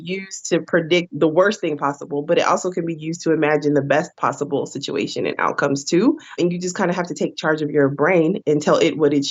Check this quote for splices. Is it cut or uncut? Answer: cut